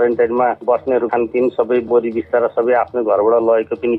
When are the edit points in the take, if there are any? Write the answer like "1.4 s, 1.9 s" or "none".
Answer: 1.0 s